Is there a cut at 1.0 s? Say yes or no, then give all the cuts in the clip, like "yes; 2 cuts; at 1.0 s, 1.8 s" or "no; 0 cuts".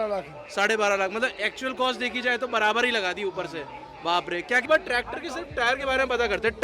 no; 1 cut; at 4.6 s